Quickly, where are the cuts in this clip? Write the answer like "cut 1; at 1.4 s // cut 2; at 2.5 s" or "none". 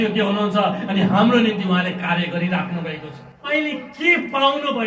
cut 1; at 3.4 s